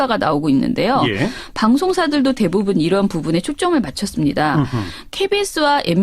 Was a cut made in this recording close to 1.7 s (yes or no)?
yes